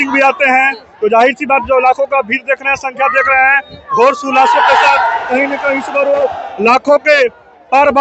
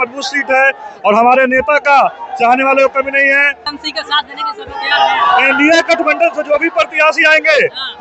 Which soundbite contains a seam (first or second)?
second